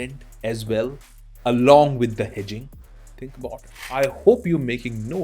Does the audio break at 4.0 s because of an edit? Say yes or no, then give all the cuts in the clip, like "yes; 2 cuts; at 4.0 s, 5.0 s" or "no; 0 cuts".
yes; 1 cut; at 4.0 s